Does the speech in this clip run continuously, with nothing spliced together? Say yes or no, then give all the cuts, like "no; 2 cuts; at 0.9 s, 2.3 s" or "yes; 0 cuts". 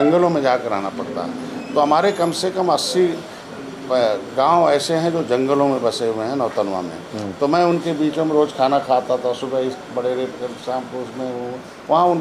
yes; 0 cuts